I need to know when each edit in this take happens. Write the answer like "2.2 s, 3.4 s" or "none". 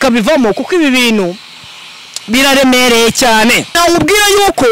3.8 s